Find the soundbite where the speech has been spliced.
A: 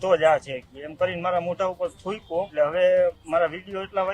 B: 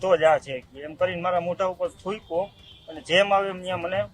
A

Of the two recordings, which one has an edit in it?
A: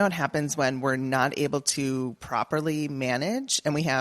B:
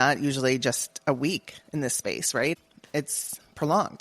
B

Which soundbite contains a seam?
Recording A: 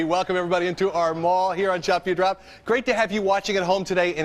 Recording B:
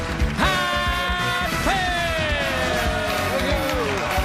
B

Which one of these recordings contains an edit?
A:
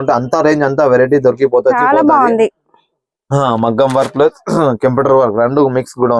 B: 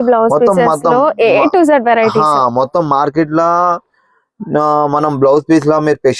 A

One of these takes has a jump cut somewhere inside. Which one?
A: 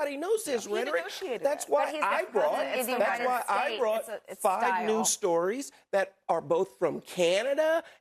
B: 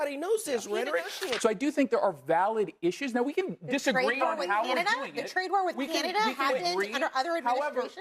B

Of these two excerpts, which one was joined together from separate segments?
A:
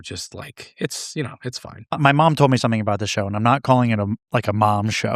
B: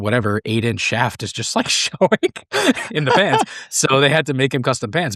A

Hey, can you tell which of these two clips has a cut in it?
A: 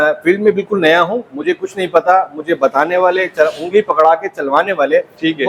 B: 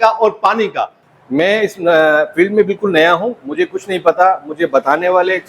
B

